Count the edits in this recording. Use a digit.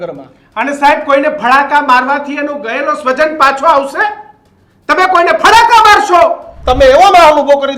1